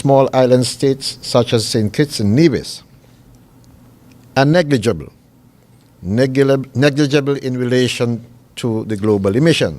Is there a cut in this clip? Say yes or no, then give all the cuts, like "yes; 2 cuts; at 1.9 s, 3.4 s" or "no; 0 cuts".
yes; 1 cut; at 7.7 s